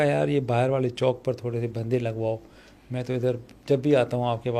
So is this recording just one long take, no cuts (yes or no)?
yes